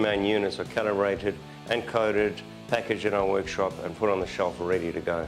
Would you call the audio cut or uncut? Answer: uncut